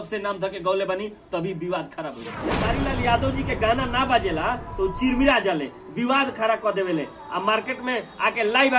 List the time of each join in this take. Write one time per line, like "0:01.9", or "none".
0:02.5